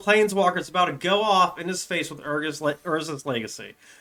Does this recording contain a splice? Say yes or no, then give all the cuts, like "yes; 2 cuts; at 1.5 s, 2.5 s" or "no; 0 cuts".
no; 0 cuts